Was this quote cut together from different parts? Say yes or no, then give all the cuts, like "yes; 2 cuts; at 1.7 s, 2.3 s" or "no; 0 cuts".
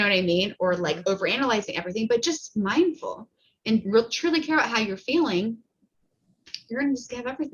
no; 0 cuts